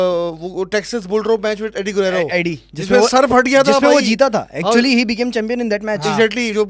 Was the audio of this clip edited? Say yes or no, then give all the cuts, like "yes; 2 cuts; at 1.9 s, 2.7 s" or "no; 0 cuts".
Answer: no; 0 cuts